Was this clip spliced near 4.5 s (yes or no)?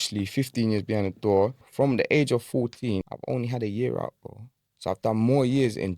no